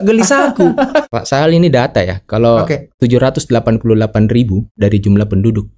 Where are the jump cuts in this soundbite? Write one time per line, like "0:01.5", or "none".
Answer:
0:01.2
0:02.9
0:04.7